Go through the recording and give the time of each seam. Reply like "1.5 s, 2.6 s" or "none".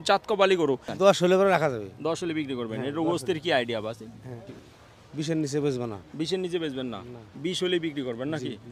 0.9 s, 4.6 s